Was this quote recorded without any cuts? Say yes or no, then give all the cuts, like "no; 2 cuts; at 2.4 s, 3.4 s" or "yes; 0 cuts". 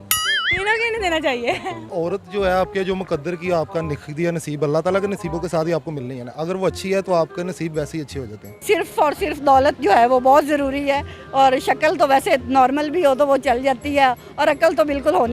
no; 2 cuts; at 1.9 s, 8.6 s